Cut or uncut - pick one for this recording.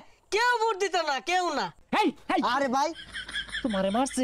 cut